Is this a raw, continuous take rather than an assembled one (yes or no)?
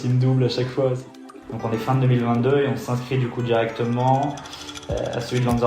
no